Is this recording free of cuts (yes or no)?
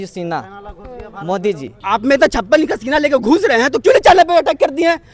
no